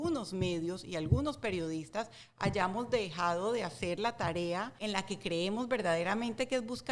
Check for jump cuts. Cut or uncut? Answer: cut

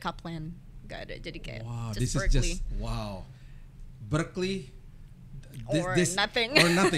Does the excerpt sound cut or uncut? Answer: uncut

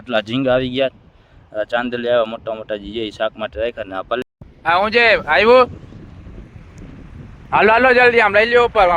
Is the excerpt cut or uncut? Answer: cut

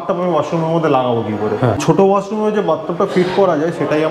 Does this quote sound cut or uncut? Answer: cut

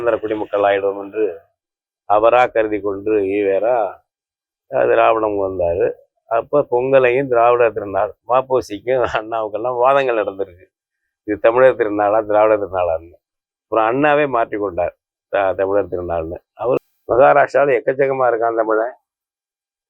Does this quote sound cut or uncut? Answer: cut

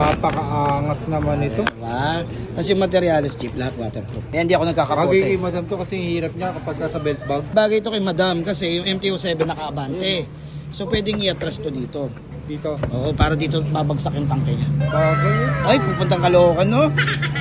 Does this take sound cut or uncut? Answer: uncut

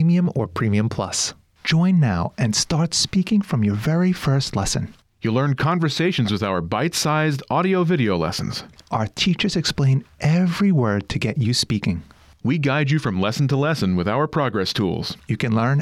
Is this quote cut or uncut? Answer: cut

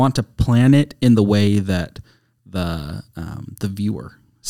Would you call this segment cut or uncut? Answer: uncut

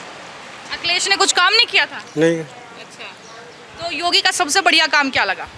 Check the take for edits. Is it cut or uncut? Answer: uncut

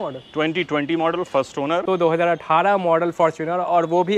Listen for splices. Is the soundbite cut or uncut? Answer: cut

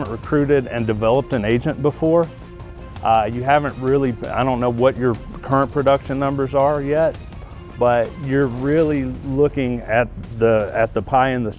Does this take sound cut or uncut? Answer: uncut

